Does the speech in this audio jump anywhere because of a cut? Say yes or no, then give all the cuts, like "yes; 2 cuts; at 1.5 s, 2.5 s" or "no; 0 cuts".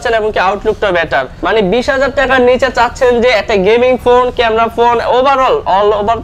yes; 1 cut; at 1.3 s